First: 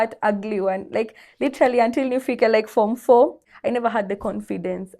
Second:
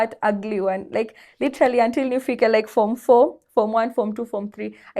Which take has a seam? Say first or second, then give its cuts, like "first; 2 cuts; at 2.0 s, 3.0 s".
first; 1 cut; at 3.4 s